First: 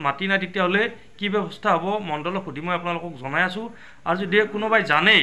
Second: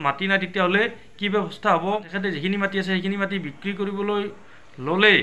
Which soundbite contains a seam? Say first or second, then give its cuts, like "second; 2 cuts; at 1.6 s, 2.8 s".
second; 1 cut; at 2.1 s